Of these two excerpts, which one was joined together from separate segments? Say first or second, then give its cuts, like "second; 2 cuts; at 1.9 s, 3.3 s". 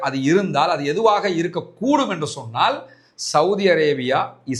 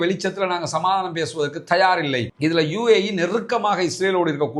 second; 1 cut; at 2.3 s